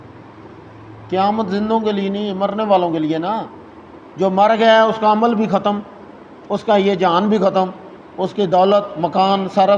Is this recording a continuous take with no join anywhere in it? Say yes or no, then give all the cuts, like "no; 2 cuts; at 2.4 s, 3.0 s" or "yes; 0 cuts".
yes; 0 cuts